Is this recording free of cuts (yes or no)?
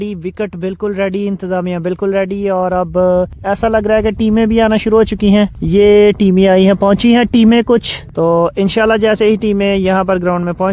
yes